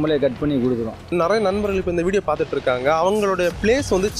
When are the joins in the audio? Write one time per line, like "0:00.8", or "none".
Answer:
0:01.1